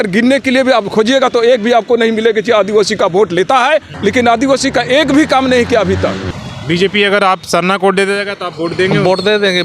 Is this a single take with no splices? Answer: no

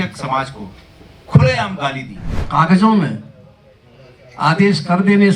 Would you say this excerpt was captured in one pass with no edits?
no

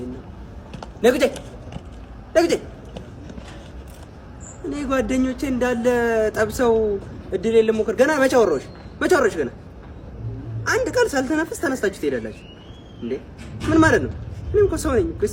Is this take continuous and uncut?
yes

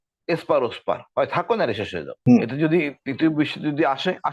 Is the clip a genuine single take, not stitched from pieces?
no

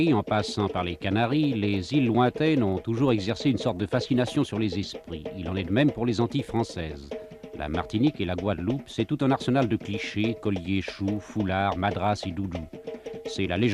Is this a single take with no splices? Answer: no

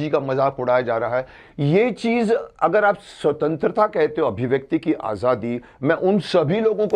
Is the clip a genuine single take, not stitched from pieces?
yes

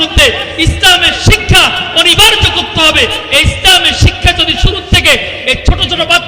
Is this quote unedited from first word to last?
yes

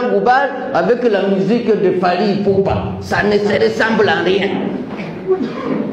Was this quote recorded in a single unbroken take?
yes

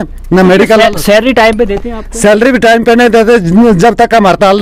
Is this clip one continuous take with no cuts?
yes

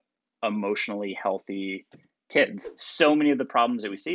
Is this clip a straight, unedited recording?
no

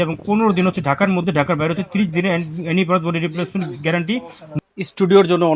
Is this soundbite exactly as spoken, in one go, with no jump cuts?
no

